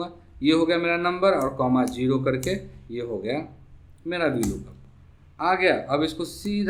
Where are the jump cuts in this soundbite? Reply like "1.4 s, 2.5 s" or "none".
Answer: none